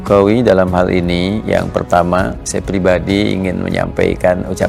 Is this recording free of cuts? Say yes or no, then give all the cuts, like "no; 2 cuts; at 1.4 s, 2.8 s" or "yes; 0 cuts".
yes; 0 cuts